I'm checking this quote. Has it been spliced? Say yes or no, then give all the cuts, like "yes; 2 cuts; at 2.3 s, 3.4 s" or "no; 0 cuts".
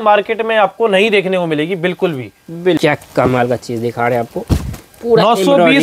yes; 1 cut; at 2.8 s